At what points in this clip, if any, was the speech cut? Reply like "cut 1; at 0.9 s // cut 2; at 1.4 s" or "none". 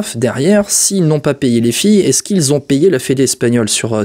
none